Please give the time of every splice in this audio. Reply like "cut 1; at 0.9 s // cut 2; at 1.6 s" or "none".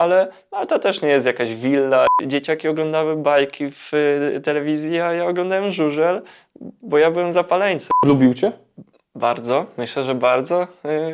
cut 1; at 2.1 s // cut 2; at 7.9 s